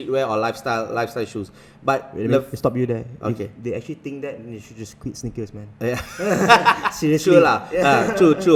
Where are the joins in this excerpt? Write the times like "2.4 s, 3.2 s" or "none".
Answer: none